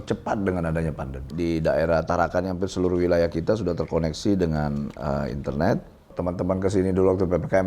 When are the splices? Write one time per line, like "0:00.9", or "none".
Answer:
0:01.3
0:06.1